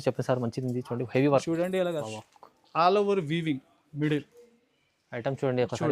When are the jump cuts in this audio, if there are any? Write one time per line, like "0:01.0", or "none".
0:02.1